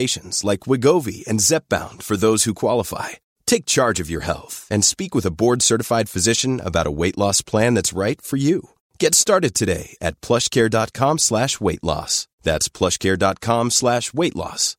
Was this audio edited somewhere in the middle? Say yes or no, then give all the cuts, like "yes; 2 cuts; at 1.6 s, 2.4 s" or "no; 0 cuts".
no; 0 cuts